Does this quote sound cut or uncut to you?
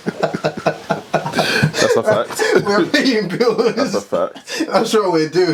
uncut